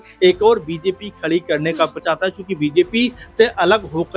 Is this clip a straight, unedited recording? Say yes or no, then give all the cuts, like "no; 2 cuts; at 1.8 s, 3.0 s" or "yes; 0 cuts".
no; 1 cut; at 2.0 s